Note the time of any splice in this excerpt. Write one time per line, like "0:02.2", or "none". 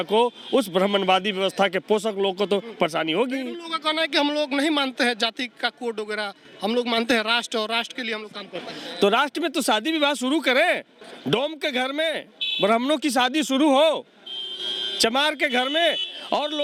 none